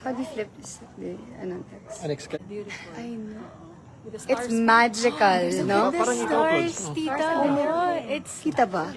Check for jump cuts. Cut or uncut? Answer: cut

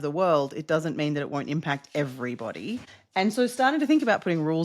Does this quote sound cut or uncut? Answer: cut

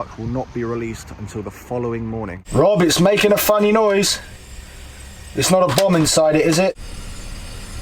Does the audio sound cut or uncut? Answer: cut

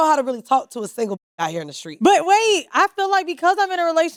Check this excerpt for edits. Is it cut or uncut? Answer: uncut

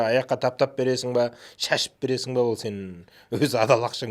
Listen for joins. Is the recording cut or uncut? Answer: uncut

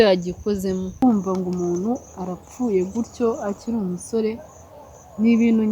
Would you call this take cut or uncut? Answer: cut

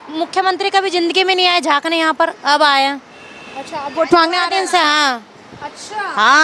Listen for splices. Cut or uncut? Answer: uncut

